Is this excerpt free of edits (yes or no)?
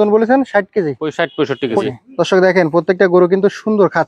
no